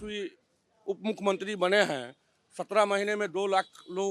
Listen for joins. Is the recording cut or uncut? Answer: uncut